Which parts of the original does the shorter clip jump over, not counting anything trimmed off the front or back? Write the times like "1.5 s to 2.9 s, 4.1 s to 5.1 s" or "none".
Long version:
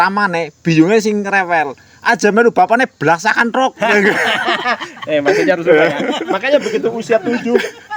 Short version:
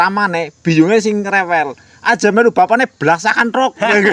none